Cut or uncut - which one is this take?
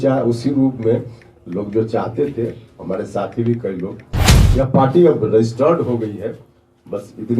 cut